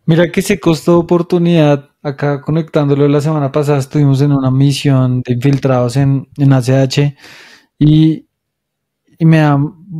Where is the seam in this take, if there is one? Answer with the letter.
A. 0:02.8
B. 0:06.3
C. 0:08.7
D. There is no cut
D